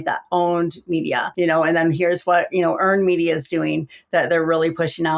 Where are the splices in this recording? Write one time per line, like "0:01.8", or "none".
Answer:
0:01.3